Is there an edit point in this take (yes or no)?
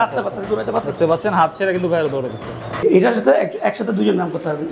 yes